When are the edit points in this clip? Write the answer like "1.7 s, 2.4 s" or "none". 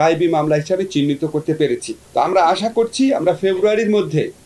2.0 s

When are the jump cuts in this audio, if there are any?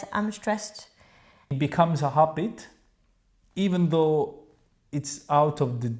1.5 s

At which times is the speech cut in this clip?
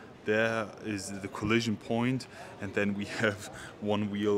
none

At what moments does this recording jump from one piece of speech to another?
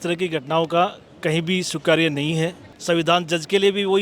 2.7 s

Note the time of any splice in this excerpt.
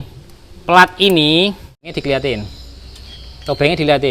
1.9 s

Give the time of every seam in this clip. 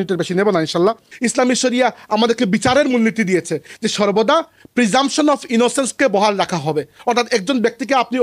1.1 s

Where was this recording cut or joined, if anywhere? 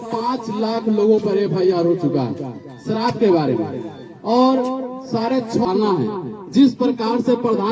5.7 s

